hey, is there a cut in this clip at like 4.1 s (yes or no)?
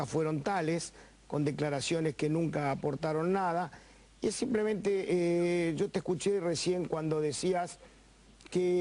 no